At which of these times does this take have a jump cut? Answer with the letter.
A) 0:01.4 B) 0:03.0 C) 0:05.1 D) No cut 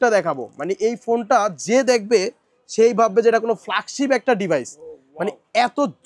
D